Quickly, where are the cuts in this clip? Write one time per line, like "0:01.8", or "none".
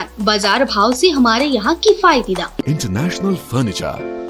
0:02.6